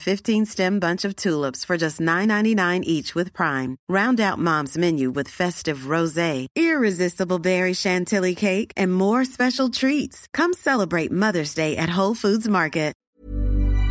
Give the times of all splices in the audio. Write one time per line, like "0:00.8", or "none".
0:13.0